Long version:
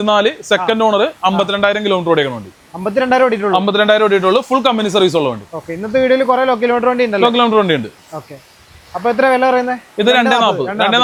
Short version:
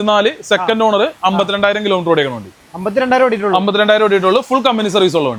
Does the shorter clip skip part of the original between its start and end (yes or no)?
no